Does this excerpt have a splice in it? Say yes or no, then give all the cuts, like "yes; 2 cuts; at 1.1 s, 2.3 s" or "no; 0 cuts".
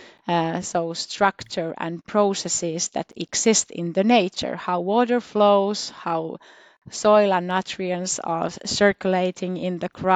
no; 0 cuts